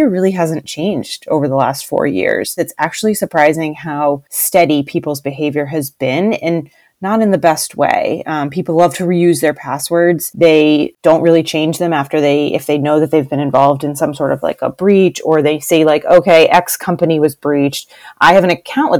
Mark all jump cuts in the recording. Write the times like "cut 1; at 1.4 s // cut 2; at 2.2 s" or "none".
cut 1; at 2.7 s // cut 2; at 4.3 s // cut 3; at 10.3 s // cut 4; at 10.9 s